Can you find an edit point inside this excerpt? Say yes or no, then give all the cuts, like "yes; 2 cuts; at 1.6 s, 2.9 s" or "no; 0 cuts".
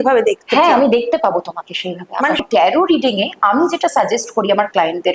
yes; 1 cut; at 2.4 s